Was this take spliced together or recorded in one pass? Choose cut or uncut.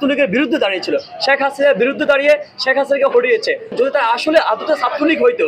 cut